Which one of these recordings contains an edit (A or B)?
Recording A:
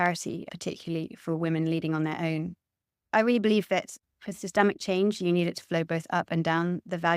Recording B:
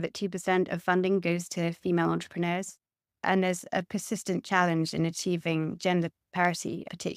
A